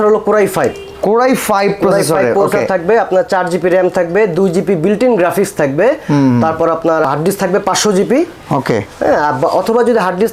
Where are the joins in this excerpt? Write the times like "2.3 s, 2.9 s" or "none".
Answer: none